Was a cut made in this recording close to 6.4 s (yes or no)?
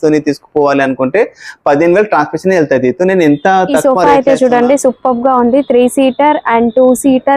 no